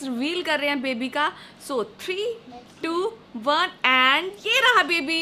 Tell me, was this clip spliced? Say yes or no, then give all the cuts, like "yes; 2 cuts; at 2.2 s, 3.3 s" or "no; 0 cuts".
no; 0 cuts